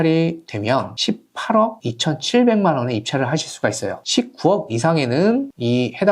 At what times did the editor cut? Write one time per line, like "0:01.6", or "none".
0:03.9